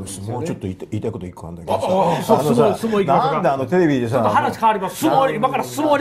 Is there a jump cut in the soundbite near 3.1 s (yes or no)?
no